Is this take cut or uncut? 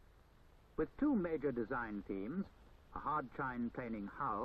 cut